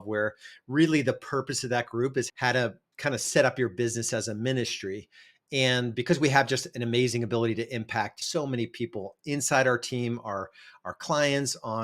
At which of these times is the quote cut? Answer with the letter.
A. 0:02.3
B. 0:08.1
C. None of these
A